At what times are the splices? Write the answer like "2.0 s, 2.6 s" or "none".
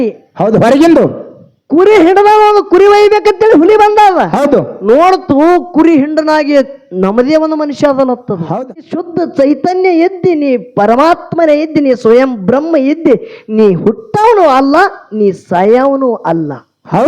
8.8 s